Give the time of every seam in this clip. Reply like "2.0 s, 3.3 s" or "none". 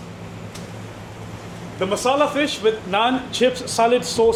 none